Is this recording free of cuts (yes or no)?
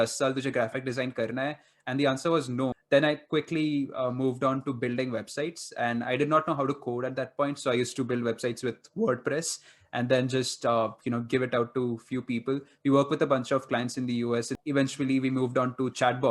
no